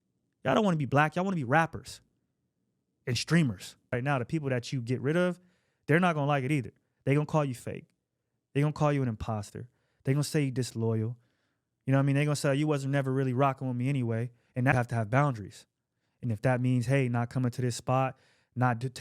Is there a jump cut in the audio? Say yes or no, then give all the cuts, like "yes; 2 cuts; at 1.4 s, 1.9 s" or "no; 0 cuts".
yes; 2 cuts; at 3.9 s, 14.7 s